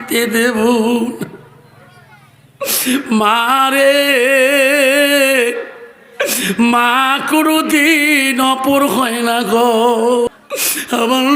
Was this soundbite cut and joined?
yes; 1 cut; at 10.3 s

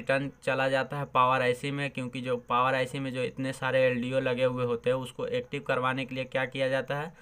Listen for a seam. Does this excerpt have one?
no; 0 cuts

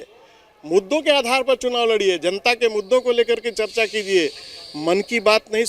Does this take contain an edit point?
no; 0 cuts

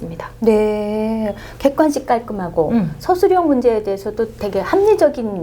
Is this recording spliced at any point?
no; 0 cuts

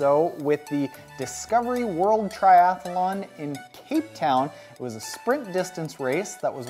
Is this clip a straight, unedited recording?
yes; 0 cuts

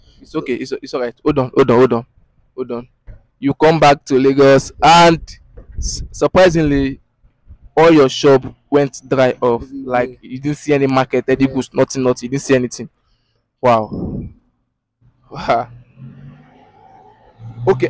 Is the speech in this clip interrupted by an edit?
no; 0 cuts

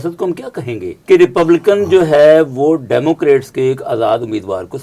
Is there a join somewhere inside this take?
yes; 1 cut; at 0.9 s

